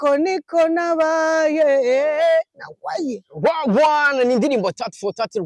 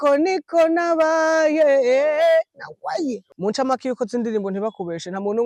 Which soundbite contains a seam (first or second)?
second